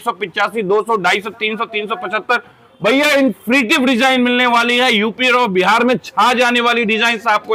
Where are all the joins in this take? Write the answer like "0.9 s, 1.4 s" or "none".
none